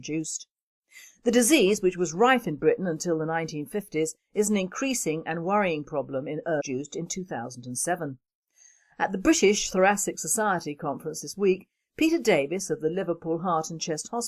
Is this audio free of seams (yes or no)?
yes